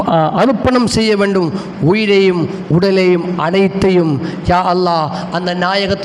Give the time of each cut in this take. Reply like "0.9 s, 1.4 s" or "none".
none